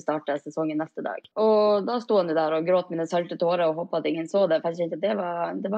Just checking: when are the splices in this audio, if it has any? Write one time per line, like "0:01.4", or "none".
0:01.2

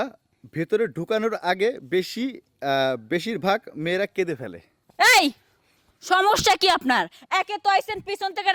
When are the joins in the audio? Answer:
0:04.8

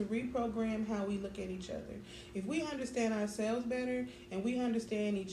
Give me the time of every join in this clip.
none

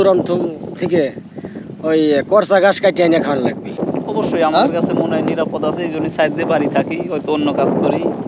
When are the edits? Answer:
0:03.9

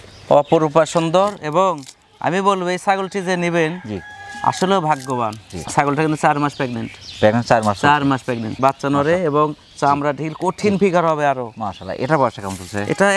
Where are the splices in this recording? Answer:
none

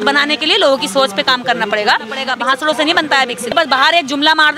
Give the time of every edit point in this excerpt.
0:02.3
0:03.5

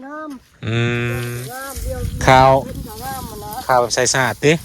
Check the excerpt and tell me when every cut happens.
0:01.4

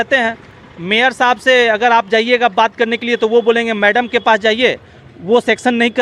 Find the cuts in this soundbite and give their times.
none

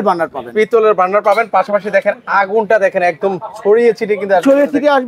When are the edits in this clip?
none

